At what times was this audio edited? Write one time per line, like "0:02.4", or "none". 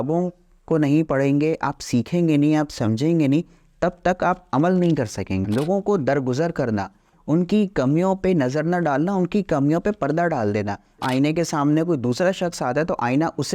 0:05.4
0:11.0